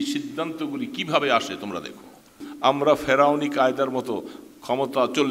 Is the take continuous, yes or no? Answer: no